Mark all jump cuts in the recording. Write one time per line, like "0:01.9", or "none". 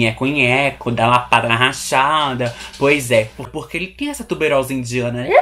0:03.5